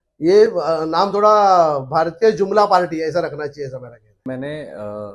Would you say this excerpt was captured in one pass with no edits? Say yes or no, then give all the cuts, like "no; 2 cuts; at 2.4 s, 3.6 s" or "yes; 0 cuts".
yes; 0 cuts